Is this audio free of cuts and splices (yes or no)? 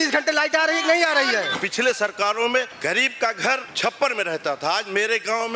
no